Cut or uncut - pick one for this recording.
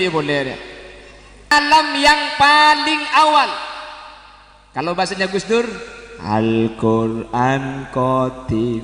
cut